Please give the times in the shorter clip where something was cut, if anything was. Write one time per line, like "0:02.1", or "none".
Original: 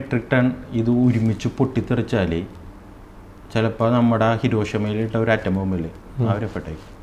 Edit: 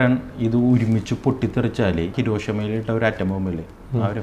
0:02.1